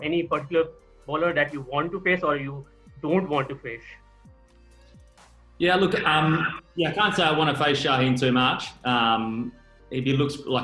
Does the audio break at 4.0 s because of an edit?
no; 0 cuts

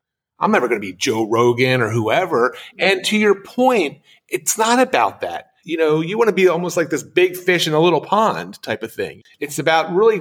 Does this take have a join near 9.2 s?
yes; 1 cut; at 9.2 s

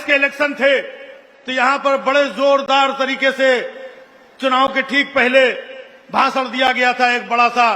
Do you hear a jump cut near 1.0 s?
no; 0 cuts

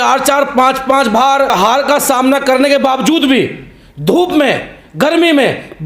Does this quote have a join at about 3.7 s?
no; 1 cut; at 1.5 s

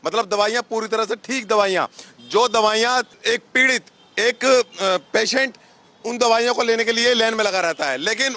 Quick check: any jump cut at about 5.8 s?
no; 1 cut; at 3.1 s

